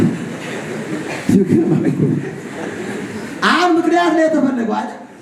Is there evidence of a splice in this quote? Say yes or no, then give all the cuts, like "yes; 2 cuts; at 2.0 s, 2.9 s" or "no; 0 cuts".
no; 0 cuts